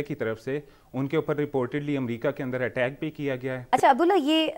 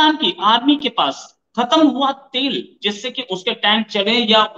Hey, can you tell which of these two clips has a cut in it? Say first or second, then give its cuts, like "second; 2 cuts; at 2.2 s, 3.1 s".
first; 1 cut; at 3.6 s